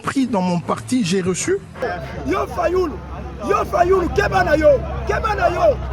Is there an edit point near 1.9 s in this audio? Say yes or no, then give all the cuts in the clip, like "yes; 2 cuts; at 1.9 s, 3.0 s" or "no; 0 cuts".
yes; 1 cut; at 1.9 s